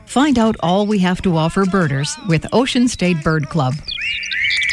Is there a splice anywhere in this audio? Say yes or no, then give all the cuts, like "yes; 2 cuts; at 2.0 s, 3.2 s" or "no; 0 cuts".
no; 0 cuts